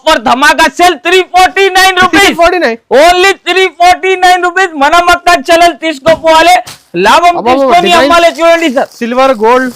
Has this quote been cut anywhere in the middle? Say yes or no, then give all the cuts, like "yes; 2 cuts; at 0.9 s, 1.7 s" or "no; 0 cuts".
no; 0 cuts